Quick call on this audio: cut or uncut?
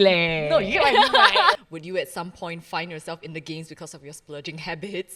cut